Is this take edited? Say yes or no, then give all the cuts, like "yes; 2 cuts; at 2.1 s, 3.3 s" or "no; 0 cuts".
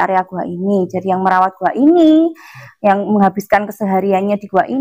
no; 0 cuts